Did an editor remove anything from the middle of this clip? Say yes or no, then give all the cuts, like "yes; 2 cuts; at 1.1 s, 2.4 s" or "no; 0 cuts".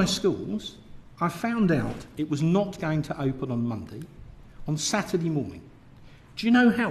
no; 0 cuts